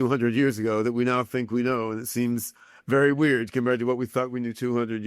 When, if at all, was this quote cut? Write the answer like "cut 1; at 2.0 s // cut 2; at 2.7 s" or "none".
none